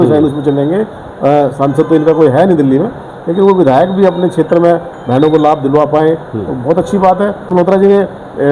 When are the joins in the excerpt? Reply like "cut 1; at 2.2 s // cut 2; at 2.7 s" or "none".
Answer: cut 1; at 7.4 s